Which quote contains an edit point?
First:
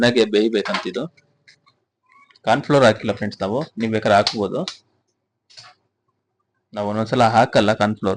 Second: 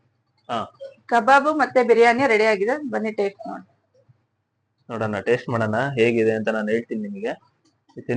first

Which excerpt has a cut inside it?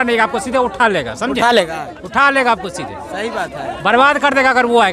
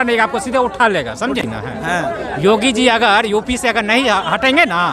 second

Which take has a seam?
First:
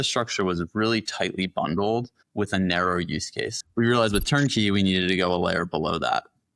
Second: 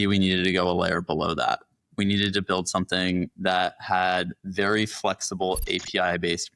first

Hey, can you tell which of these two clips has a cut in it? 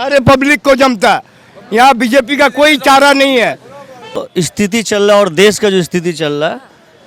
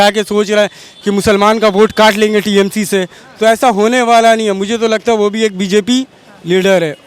first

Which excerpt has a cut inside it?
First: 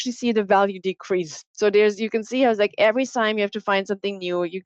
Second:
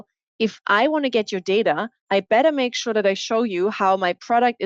second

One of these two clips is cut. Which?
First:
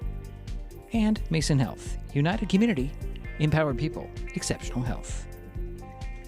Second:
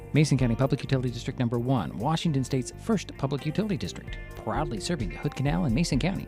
first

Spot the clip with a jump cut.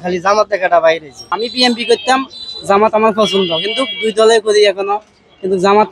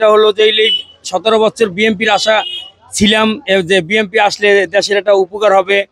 first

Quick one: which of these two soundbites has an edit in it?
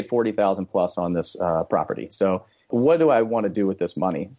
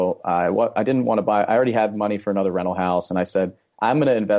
first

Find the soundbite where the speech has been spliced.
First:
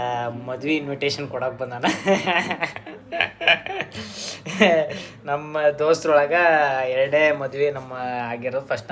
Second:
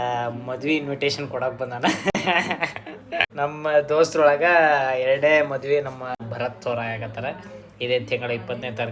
second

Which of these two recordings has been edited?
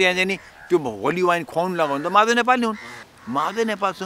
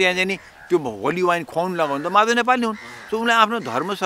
first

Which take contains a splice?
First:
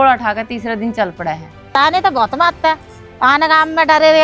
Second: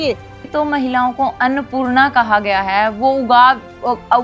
first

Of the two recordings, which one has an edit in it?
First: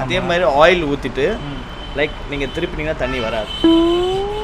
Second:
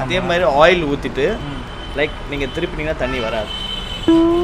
first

